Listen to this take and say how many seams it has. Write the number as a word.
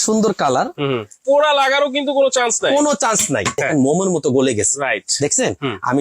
two